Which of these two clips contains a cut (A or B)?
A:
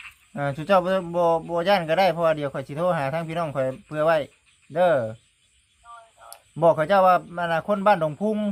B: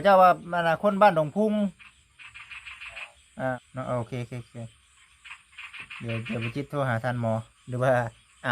B